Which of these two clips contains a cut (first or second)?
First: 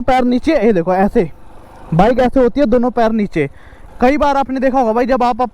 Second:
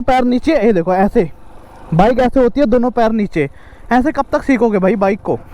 first